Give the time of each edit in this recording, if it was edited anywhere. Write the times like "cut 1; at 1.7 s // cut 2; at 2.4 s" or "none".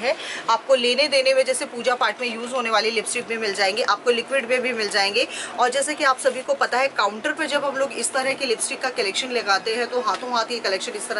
none